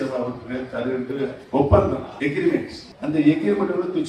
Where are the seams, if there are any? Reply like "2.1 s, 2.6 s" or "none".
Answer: 1.4 s, 2.1 s, 2.8 s